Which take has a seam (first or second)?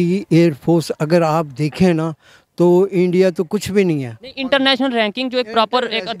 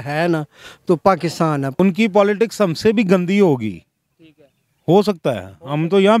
second